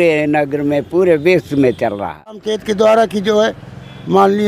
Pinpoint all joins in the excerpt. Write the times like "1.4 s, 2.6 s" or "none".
2.5 s